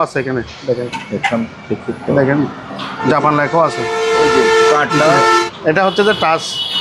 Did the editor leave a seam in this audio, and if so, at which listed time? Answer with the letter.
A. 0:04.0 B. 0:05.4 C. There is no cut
B